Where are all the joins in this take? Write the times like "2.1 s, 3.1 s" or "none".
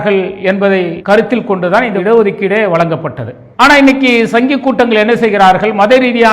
1.0 s